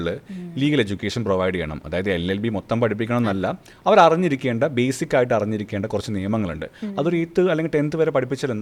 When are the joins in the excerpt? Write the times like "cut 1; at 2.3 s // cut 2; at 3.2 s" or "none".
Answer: none